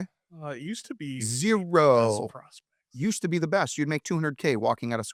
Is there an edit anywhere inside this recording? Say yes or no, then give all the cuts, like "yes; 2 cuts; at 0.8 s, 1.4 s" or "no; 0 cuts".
no; 0 cuts